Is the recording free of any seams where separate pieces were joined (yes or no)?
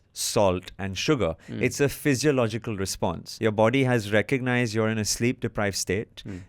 no